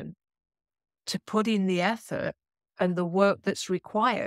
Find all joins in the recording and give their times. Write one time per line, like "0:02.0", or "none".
none